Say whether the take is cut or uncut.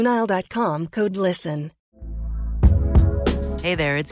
cut